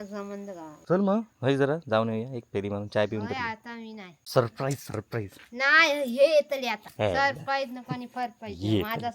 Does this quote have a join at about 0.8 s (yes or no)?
yes